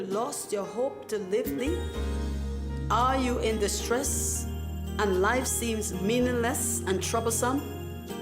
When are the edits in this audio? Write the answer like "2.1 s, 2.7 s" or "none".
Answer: 1.6 s